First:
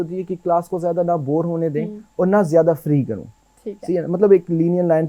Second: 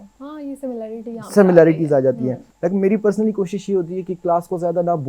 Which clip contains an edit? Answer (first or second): second